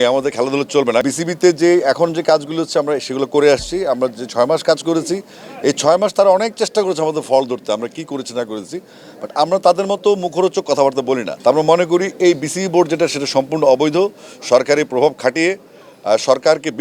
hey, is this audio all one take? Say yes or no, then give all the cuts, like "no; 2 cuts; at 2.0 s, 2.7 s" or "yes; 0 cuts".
no; 2 cuts; at 1.0 s, 11.3 s